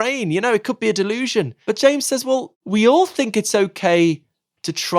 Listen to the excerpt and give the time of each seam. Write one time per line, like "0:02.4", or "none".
0:01.5
0:02.5